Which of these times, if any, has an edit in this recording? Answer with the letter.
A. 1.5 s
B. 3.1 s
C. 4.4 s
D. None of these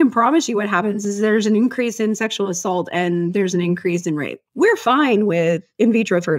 C